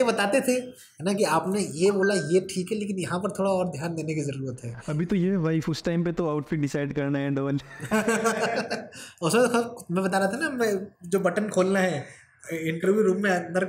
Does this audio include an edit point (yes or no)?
no